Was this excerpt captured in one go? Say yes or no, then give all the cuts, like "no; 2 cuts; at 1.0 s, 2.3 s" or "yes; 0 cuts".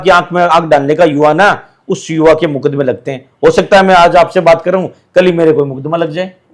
yes; 0 cuts